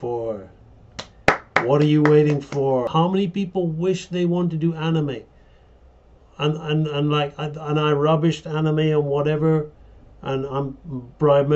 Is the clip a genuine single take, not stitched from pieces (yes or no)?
no